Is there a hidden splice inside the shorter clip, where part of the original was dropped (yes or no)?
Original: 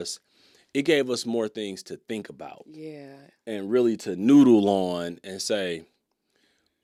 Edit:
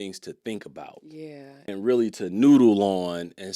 yes